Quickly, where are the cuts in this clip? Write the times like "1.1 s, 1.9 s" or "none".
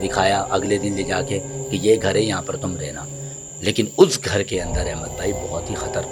none

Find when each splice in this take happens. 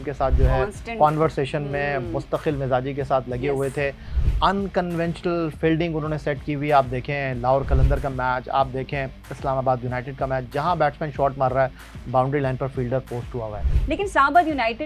13.7 s

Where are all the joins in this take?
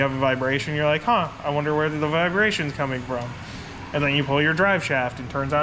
none

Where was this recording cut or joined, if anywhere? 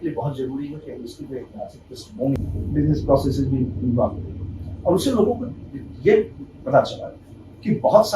2.4 s

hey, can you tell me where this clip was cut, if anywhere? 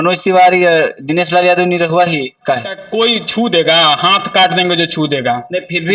2.8 s

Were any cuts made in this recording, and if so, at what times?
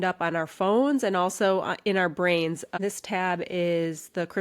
2.8 s

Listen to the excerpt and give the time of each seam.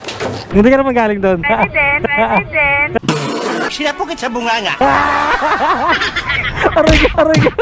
1.5 s

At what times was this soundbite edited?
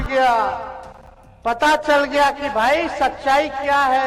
none

